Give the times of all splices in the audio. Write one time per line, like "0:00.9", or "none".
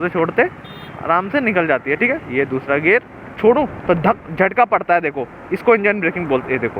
0:03.3